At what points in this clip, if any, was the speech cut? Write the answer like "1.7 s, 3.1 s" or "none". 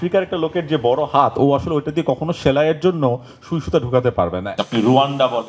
4.6 s